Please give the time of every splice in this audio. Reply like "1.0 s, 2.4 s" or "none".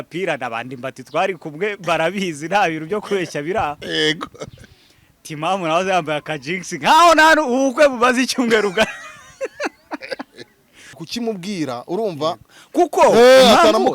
11.0 s